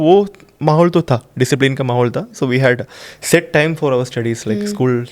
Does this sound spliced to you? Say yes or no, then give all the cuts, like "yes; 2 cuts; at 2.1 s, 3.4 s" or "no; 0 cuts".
no; 0 cuts